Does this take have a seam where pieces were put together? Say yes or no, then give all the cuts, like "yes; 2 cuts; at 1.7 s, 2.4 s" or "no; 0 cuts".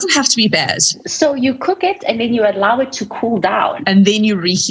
yes; 2 cuts; at 1.0 s, 3.8 s